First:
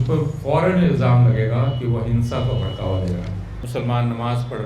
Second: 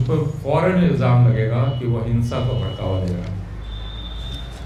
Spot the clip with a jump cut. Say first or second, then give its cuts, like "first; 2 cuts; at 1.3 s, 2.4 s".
first; 1 cut; at 3.5 s